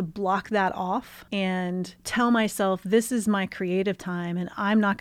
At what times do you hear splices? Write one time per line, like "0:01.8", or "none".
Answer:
0:01.5